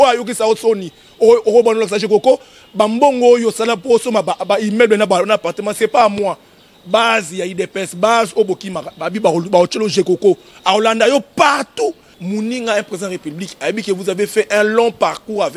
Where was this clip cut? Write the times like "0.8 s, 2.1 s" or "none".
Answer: 12.1 s